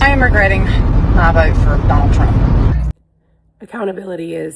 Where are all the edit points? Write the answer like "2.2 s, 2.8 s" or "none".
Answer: 2.9 s